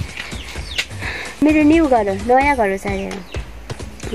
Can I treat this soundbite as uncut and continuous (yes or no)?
no